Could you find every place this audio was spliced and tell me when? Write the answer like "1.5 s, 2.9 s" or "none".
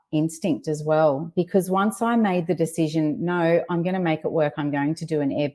none